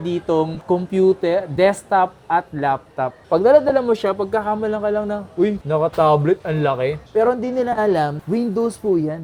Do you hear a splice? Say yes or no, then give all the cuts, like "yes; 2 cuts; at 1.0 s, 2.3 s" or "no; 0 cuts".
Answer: no; 0 cuts